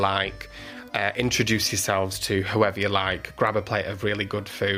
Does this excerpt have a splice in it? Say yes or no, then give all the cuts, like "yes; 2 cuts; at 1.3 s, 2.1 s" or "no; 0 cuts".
no; 0 cuts